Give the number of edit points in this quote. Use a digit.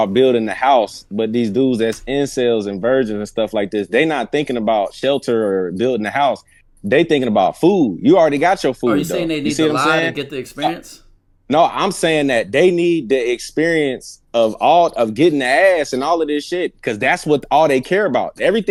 0